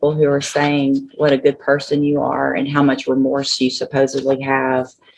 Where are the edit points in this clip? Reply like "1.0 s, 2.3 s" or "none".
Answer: none